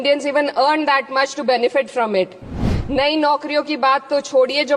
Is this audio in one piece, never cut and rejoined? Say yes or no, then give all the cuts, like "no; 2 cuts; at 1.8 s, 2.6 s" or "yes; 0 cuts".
no; 1 cut; at 2.7 s